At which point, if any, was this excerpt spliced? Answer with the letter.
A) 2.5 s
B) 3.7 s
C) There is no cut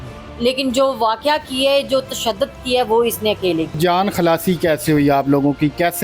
B